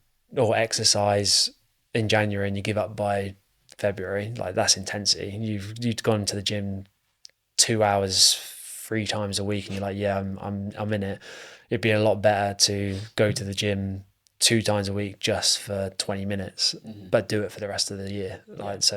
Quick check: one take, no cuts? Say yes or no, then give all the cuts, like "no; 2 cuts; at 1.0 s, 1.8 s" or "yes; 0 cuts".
yes; 0 cuts